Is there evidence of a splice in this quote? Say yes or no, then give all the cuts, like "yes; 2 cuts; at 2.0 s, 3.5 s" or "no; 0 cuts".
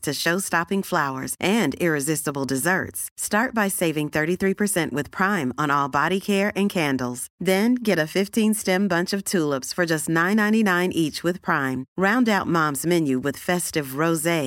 no; 0 cuts